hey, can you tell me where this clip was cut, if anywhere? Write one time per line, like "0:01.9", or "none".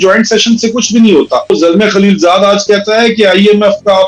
0:01.5